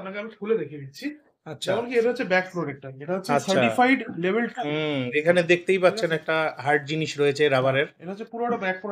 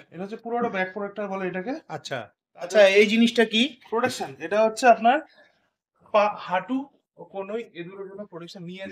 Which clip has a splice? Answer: second; 1 cut; at 2.4 s

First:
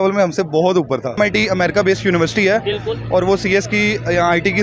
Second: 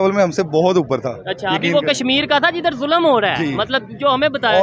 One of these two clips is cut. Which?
first; 1 cut; at 1.2 s

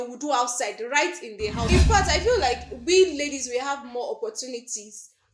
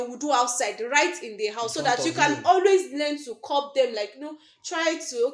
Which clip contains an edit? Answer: first; 1 cut; at 1.7 s

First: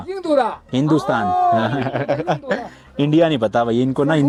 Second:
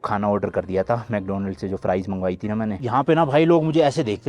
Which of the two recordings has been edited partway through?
second; 1 cut; at 2.8 s

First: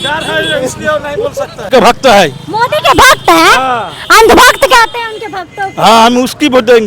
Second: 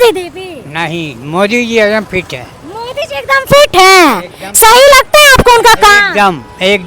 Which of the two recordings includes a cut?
first; 1 cut; at 1.6 s

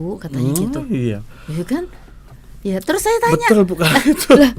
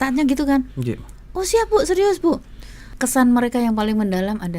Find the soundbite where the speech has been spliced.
second; 1 cut; at 2.9 s

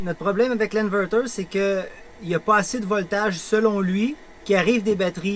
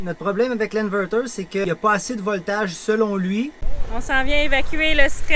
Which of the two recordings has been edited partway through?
second; 2 cuts; at 1.6 s, 3.6 s

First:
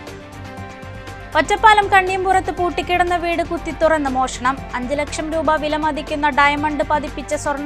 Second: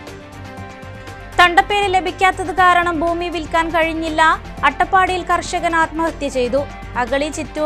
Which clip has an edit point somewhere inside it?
first; 1 cut; at 0.9 s

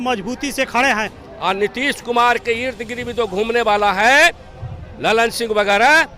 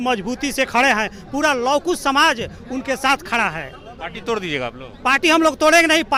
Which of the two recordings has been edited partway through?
first; 1 cut; at 1.2 s

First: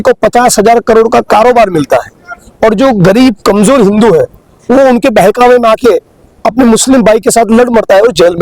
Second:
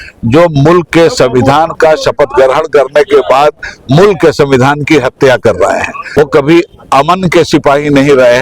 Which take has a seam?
second; 1 cut; at 6.2 s

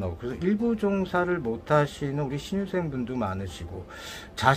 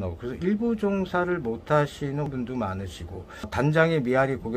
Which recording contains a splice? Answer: second; 2 cuts; at 2.3 s, 3.5 s

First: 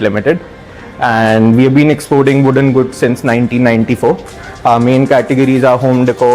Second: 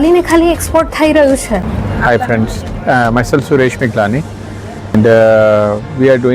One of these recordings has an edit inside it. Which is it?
second; 1 cut; at 1.7 s

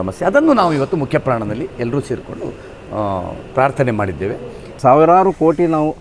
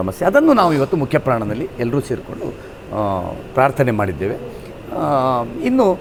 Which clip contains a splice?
first; 1 cut; at 4.8 s

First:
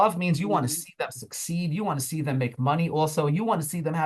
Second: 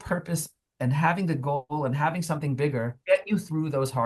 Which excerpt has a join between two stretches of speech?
second; 1 cut; at 3.0 s

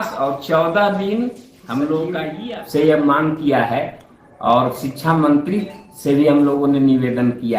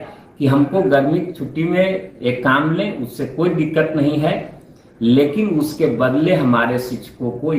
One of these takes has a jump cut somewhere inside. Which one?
first; 1 cut; at 2.3 s

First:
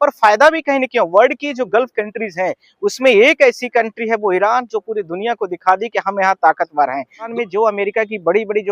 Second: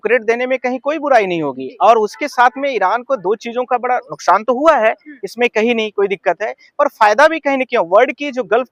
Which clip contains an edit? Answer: first; 1 cut; at 7.3 s

